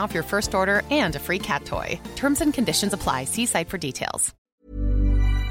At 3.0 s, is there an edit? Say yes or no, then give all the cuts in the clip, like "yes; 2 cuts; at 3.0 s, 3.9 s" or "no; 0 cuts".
no; 1 cut; at 4.3 s